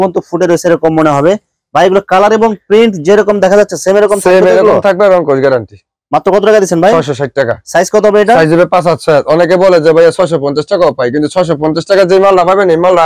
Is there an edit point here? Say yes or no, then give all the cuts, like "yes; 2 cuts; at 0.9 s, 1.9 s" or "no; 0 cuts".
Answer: no; 0 cuts